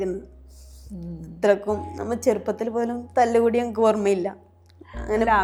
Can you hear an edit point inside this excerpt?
no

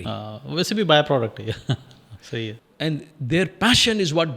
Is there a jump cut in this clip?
yes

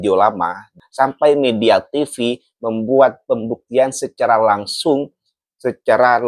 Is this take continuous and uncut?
yes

